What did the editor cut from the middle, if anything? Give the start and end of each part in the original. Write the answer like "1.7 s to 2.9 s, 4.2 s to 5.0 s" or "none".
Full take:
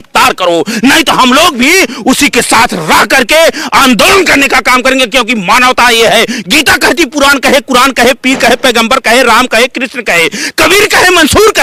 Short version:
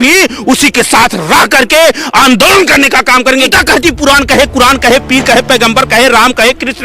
5.1 s to 6.6 s